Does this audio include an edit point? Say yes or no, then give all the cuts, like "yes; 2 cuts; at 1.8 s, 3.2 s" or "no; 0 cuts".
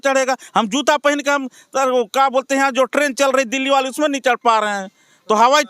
no; 0 cuts